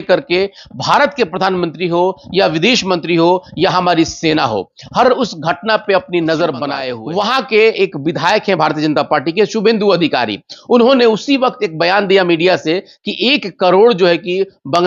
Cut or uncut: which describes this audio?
cut